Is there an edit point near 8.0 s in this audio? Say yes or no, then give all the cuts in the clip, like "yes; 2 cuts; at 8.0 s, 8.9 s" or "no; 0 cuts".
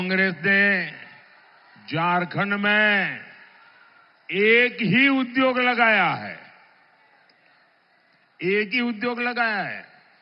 no; 0 cuts